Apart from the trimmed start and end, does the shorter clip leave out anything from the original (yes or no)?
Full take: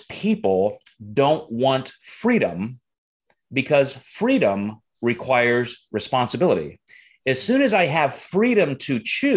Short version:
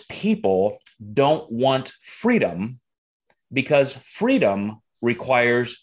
no